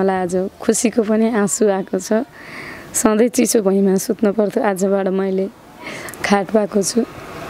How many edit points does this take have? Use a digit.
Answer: 0